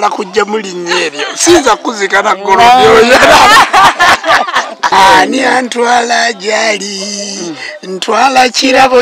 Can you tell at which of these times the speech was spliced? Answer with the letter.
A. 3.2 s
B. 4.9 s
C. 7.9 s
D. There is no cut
B